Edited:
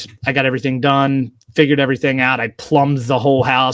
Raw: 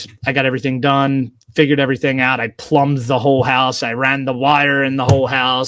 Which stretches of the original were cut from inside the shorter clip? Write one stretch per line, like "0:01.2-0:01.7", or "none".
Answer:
none